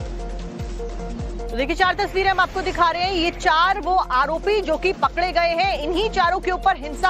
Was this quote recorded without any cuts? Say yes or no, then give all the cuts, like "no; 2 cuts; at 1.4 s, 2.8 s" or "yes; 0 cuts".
no; 1 cut; at 1.5 s